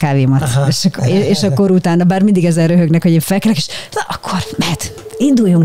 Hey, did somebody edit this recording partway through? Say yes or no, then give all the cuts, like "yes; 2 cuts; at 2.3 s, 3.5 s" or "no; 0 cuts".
no; 0 cuts